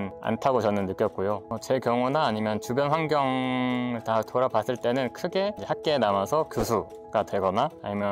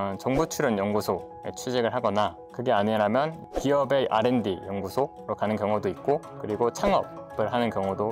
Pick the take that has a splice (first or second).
first